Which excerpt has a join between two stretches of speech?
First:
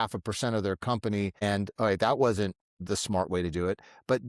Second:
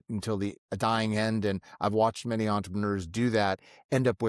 first; 2 cuts; at 1.4 s, 2.7 s

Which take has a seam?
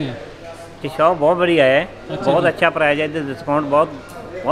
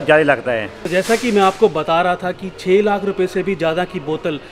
second; 1 cut; at 0.9 s

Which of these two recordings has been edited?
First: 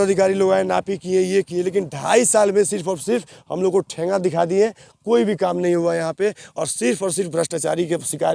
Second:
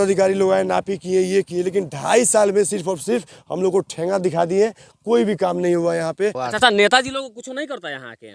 second; 1 cut; at 6.4 s

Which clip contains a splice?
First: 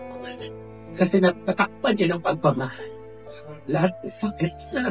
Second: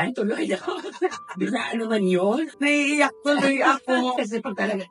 second; 2 cuts; at 2.5 s, 4.2 s

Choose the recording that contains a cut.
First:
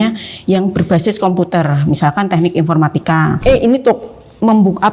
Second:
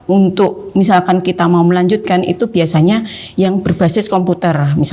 first; 1 cut; at 3.4 s

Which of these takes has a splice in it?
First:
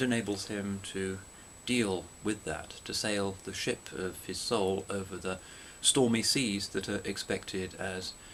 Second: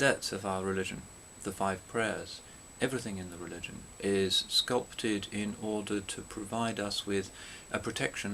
second; 1 cut; at 3.9 s

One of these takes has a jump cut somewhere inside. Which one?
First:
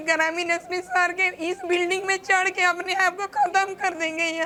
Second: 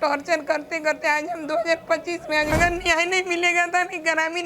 second; 1 cut; at 2.5 s

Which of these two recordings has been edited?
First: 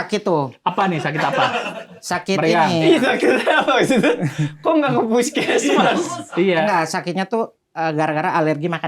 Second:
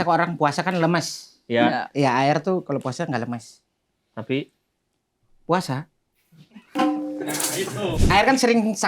second; 1 cut; at 8.0 s

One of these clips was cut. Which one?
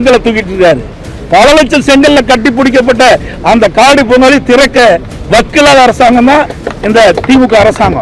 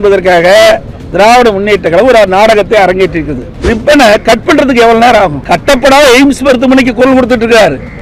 second; 2 cuts; at 3.7 s, 5.4 s

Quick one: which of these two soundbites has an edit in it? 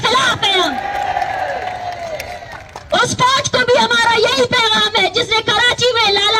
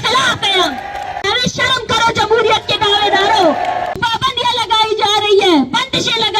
second; 2 cuts; at 1.2 s, 4.0 s

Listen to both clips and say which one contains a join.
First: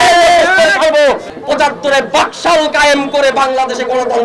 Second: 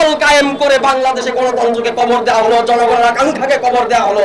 first; 1 cut; at 1.2 s

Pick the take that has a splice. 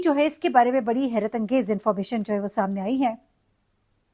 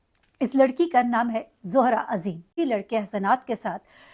second; 1 cut; at 2.5 s

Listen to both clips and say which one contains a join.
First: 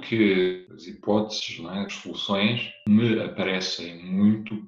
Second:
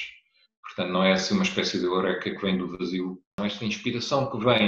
second; 1 cut; at 3.3 s

